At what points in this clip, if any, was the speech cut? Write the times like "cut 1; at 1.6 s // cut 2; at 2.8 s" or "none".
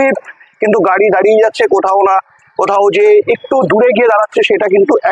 none